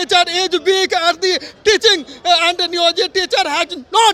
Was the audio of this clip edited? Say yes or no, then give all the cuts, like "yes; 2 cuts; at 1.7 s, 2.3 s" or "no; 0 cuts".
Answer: no; 0 cuts